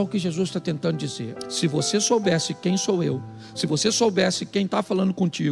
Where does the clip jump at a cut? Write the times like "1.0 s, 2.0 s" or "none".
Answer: 1.3 s